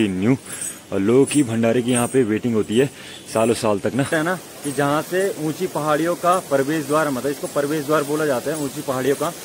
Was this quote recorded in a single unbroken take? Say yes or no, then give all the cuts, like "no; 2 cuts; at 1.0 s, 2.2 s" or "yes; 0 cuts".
no; 1 cut; at 4.1 s